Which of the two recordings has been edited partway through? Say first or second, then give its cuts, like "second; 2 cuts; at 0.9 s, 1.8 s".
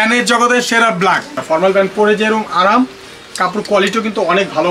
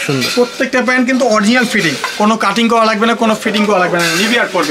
first; 1 cut; at 1.4 s